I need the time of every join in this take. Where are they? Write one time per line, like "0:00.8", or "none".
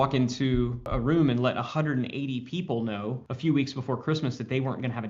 0:00.9
0:03.3